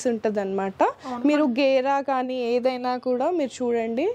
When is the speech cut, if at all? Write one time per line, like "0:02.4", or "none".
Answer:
none